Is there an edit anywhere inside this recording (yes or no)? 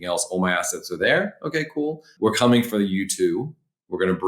yes